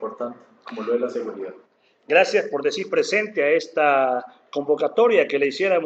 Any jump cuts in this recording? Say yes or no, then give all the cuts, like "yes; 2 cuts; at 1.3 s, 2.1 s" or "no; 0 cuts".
no; 0 cuts